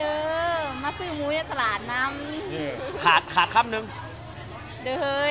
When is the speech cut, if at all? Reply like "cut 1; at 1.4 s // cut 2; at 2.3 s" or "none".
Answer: none

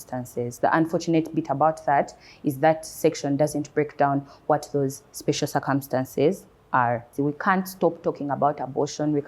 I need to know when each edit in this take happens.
cut 1; at 7.1 s

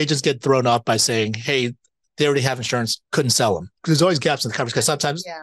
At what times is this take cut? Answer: cut 1; at 3.0 s // cut 2; at 3.7 s

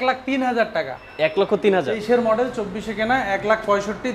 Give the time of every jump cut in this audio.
cut 1; at 1.9 s

